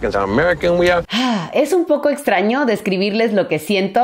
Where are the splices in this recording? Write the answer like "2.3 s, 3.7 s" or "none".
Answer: 1.1 s

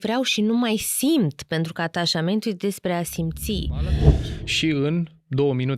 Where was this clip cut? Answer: 4.1 s

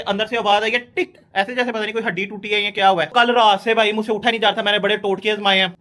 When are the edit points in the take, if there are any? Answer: none

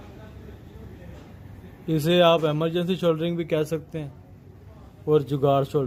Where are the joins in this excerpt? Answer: none

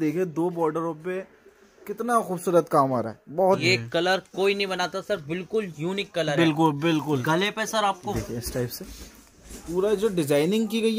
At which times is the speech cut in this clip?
3.6 s, 8.1 s

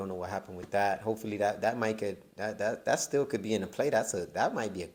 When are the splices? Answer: none

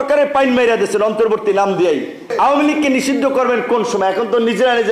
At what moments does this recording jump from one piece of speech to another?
2.3 s

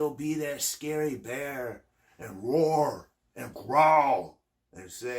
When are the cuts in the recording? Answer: none

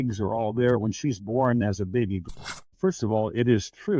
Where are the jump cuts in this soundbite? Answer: 2.2 s

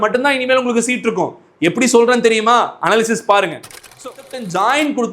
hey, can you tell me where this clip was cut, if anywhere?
4.0 s

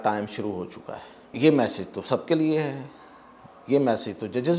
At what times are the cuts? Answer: 1.3 s

